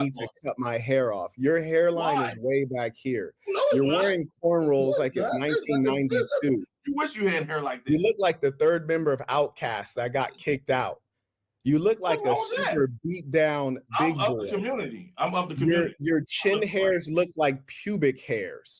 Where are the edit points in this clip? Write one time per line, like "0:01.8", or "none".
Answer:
0:04.9